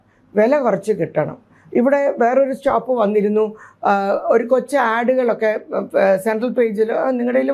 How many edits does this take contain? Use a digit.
0